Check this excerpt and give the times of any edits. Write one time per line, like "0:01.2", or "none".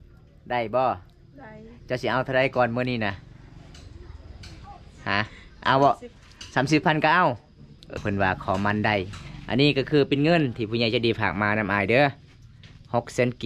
0:07.9